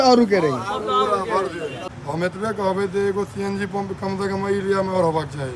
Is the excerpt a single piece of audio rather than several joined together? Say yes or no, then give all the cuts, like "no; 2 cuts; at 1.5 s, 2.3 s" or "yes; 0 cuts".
no; 1 cut; at 1.9 s